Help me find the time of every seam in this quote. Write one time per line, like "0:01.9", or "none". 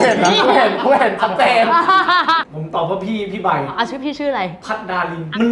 0:02.5